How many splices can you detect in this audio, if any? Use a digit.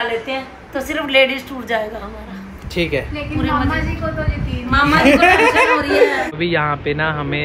1